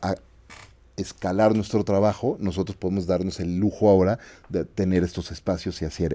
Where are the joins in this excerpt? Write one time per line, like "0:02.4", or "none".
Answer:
none